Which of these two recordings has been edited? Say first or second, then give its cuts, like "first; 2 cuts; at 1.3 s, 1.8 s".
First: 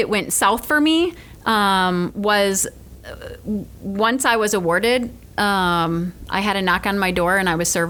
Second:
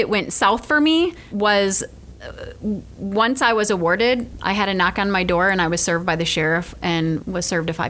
second; 2 cuts; at 1.3 s, 4.3 s